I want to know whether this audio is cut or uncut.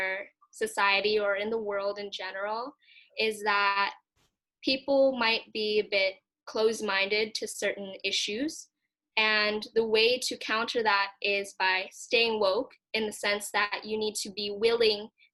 uncut